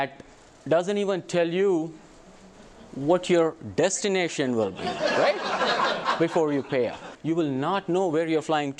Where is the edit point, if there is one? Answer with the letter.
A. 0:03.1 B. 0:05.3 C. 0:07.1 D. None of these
C